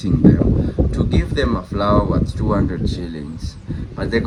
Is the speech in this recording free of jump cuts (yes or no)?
yes